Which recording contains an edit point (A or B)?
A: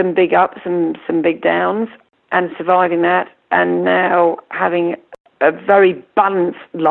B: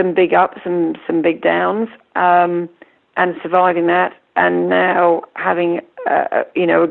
A